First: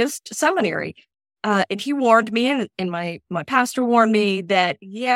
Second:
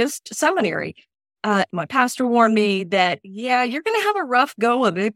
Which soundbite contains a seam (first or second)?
second